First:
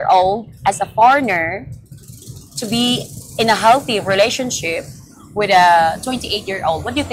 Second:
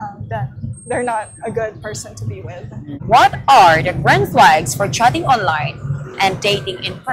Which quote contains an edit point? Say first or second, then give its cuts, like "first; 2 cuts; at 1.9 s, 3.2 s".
second; 1 cut; at 3.0 s